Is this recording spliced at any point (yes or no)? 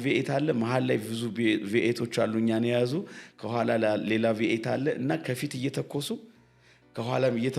no